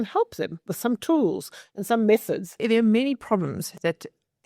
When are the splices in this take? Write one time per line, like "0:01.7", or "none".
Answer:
0:02.6